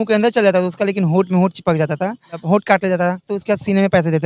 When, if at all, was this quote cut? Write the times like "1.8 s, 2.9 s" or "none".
2.3 s, 3.3 s